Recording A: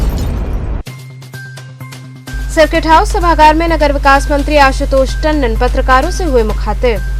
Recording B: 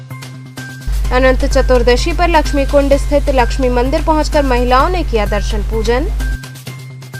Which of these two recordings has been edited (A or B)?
A